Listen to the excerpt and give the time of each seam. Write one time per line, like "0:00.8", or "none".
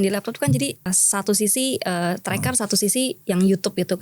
0:00.9